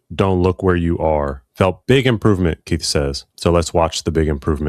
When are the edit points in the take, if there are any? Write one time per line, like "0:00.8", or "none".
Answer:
0:01.4
0:03.3